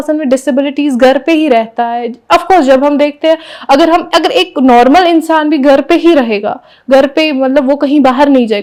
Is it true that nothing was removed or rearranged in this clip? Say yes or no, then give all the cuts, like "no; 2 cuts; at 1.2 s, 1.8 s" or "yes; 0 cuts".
yes; 0 cuts